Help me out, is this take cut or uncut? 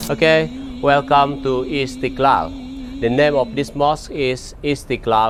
uncut